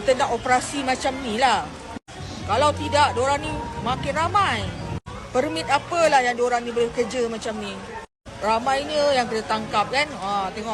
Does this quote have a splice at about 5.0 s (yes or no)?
no